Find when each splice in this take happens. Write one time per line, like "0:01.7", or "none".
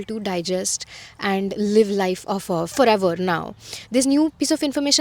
0:02.7

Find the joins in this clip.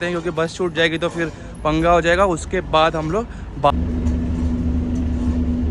0:03.7

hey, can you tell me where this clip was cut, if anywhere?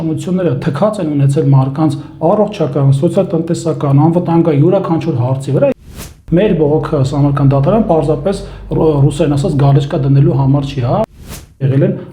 0:05.8
0:11.1

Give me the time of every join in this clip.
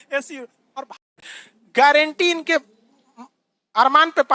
0:01.0

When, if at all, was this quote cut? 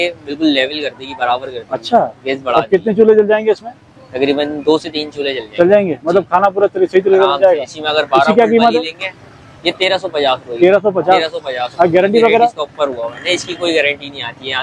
none

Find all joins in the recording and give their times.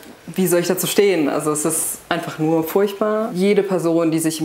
0:03.3

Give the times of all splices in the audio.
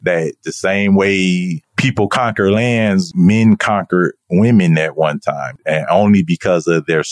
none

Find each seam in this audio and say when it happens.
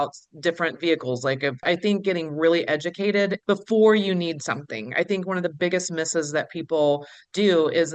0:01.6
0:03.4

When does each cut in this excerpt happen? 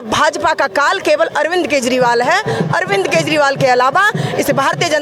none

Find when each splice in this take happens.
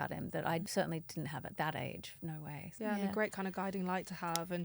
none

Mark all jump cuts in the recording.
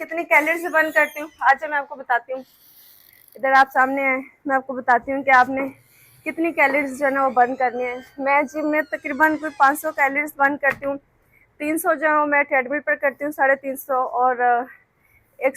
none

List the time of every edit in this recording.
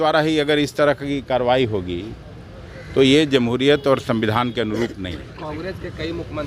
none

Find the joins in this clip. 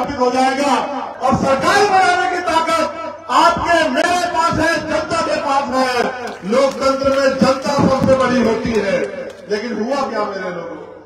0:01.1

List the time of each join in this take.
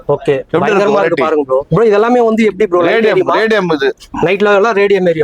none

